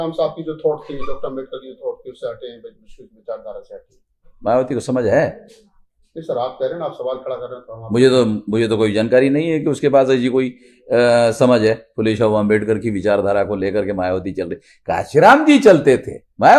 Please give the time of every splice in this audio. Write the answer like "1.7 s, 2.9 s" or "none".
none